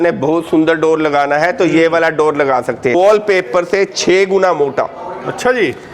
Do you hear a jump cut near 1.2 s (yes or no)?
no